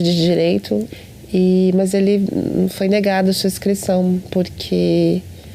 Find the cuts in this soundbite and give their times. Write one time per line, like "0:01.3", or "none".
0:00.9